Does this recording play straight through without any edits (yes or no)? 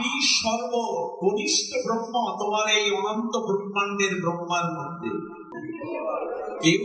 no